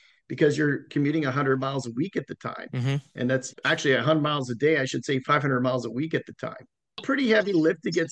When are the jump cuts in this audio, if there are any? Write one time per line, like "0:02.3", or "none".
0:07.0